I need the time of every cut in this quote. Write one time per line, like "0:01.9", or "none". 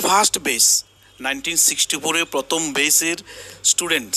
none